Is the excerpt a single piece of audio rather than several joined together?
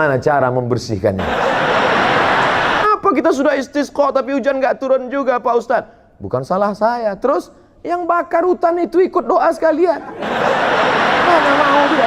no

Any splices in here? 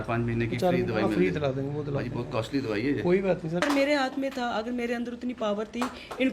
yes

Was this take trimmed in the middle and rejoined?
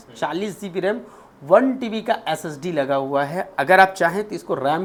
no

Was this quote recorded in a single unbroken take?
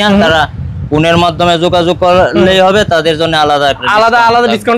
yes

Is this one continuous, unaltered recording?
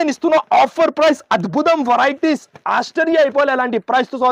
yes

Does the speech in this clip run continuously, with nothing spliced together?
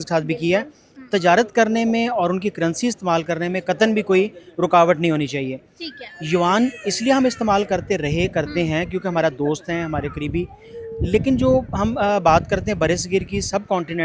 yes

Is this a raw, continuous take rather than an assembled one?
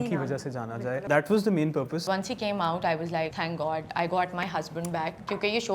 no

